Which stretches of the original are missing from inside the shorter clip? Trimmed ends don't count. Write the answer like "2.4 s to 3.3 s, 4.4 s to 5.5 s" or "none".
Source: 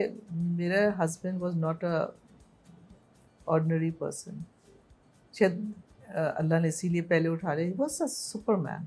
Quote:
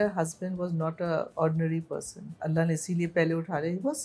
2.1 s to 3.4 s, 4.5 s to 6.4 s